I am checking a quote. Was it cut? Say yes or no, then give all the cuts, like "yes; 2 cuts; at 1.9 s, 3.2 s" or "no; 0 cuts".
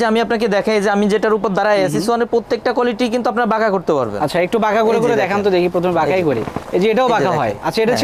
no; 0 cuts